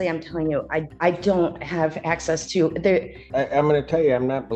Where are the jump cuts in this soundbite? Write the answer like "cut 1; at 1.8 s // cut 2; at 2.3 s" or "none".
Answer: cut 1; at 0.9 s // cut 2; at 3.2 s